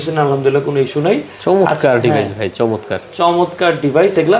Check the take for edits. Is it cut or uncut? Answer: uncut